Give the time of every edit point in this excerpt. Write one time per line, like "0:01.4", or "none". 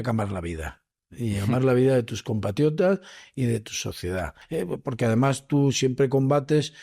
0:04.4

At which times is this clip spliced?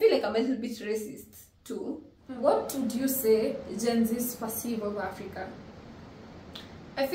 0:02.2

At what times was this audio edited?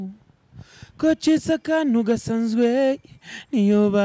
none

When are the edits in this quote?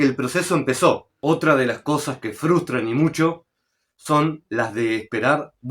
0:01.1

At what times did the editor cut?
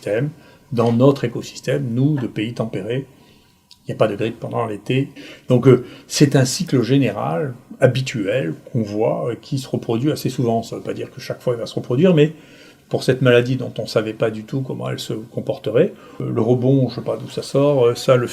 0:05.2
0:16.1

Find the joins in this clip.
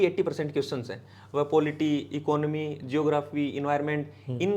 none

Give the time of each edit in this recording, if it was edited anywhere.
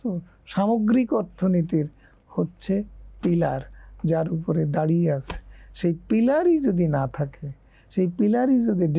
none

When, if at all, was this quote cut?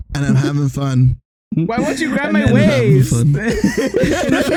none

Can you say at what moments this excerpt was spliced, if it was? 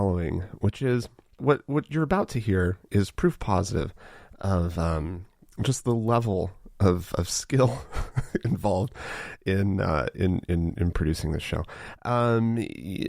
0:01.4

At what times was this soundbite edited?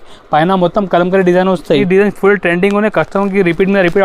0:01.8

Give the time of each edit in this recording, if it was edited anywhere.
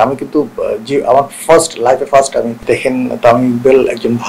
0:02.6

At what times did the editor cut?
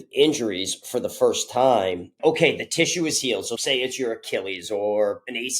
0:02.1
0:03.5

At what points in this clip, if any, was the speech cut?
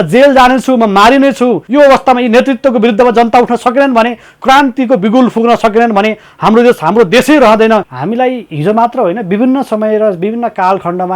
0:01.6
0:07.9

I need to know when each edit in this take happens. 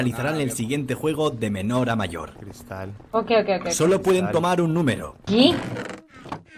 0:05.2

